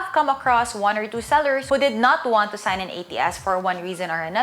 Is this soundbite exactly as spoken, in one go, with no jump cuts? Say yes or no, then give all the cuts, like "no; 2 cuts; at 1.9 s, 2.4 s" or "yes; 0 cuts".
no; 1 cut; at 1.6 s